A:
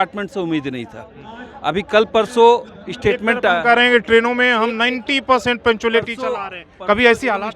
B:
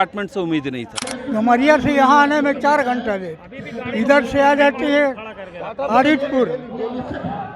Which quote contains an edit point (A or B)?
B